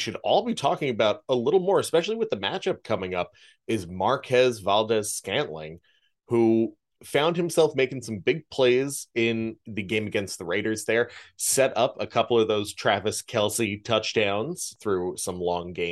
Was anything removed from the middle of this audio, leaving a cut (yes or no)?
yes